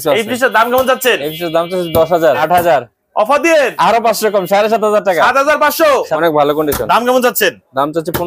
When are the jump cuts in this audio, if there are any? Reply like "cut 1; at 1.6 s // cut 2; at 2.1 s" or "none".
cut 1; at 2.4 s // cut 2; at 6.2 s

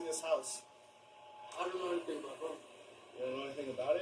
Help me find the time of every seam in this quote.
cut 1; at 1.4 s

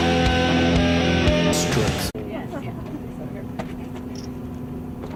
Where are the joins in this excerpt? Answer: none

